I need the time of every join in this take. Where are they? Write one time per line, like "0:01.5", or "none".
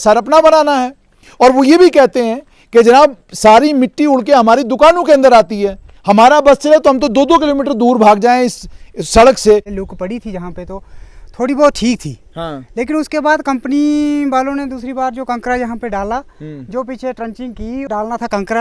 0:09.7
0:17.9